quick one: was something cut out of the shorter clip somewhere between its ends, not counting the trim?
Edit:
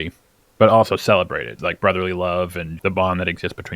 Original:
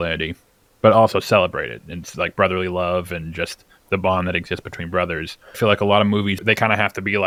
yes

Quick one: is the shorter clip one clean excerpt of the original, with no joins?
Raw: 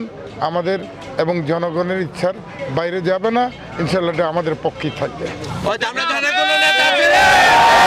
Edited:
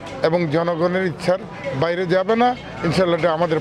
yes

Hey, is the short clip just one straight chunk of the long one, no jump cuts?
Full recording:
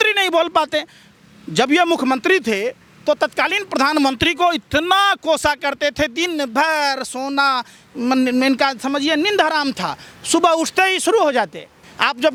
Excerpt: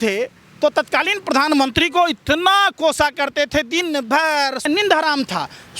no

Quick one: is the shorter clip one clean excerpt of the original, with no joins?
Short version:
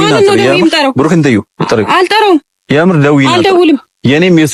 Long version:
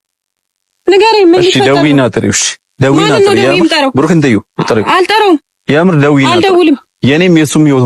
yes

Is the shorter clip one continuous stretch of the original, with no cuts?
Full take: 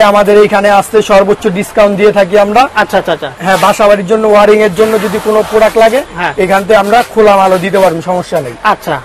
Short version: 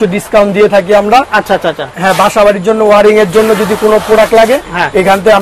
yes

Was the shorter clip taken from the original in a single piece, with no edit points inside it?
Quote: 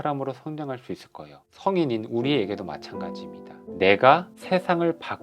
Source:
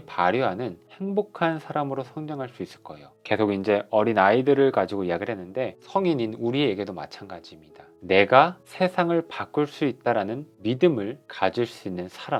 no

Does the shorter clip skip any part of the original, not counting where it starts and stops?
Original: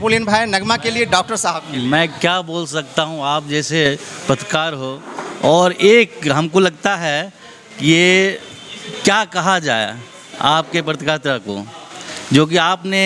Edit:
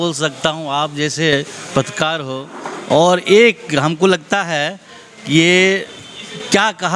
no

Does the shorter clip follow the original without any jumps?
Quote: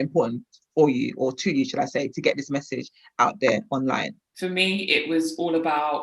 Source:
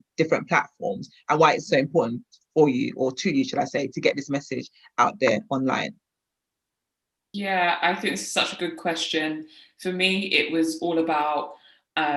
no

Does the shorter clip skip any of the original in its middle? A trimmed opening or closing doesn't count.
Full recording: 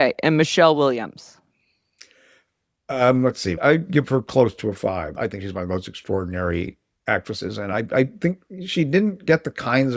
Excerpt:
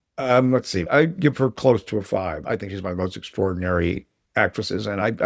no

